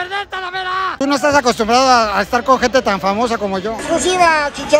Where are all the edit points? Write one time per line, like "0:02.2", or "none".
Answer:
0:01.0
0:03.8